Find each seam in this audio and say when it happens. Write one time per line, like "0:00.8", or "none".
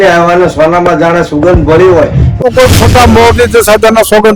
0:02.2